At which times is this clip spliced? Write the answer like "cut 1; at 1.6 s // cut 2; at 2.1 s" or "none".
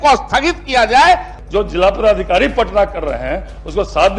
cut 1; at 1.4 s